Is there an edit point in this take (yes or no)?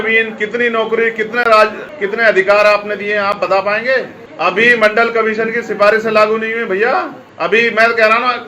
yes